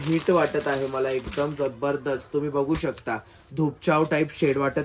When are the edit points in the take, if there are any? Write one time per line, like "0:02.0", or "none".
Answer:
none